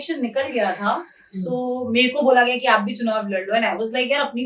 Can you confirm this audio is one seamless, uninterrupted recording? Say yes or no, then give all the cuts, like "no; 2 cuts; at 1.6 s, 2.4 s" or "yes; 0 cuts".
yes; 0 cuts